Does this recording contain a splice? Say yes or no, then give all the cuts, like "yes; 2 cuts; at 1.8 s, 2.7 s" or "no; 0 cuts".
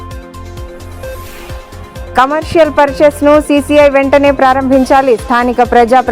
yes; 1 cut; at 1.7 s